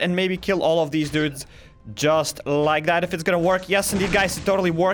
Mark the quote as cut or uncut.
uncut